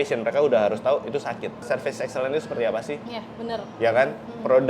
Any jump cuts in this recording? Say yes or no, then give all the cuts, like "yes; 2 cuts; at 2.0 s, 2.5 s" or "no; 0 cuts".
yes; 1 cut; at 1.6 s